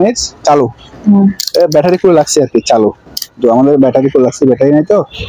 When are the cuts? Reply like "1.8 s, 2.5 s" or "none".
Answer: none